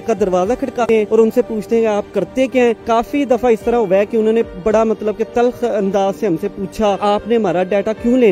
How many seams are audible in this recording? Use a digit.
2